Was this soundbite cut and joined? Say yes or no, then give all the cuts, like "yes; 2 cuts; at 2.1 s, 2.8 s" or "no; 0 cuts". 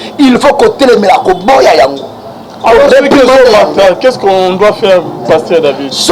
no; 0 cuts